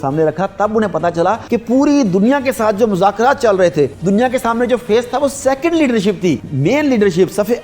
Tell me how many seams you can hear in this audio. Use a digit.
3